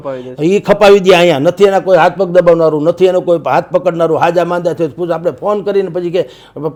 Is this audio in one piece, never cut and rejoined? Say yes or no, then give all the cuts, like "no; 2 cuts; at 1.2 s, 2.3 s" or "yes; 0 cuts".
yes; 0 cuts